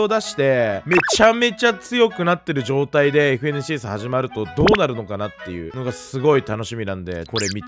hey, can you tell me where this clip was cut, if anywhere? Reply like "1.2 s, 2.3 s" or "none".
none